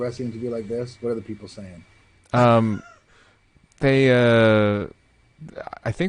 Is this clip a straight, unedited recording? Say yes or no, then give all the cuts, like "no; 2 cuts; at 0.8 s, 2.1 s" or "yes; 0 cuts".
yes; 0 cuts